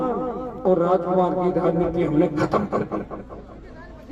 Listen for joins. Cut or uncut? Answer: uncut